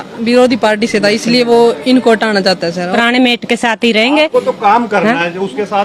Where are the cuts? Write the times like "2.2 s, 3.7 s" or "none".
2.9 s